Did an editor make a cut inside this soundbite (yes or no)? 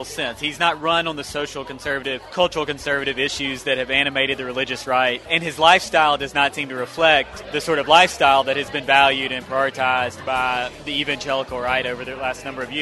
yes